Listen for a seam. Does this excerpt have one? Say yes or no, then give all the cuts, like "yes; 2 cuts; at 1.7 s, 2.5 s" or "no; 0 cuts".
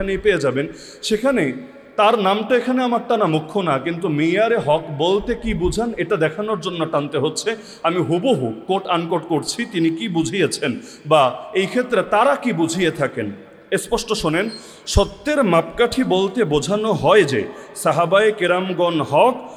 no; 0 cuts